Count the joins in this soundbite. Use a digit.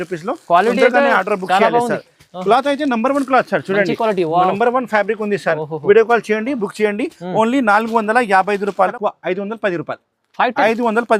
1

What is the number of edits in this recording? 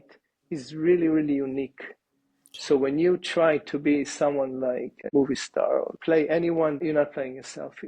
3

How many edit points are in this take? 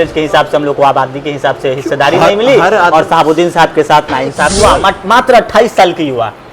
1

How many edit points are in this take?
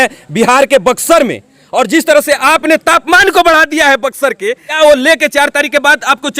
1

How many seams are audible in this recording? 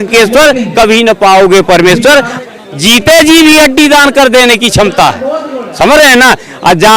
1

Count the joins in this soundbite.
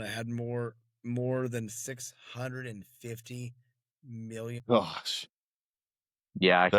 1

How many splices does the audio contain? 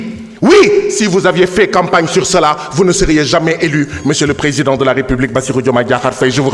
0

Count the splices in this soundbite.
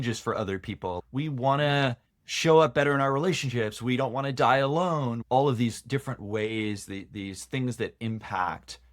2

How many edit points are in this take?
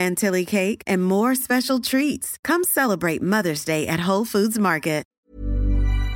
1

